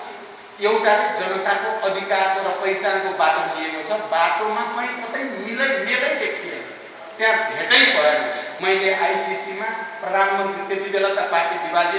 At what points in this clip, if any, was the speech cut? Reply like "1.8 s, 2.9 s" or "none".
8.5 s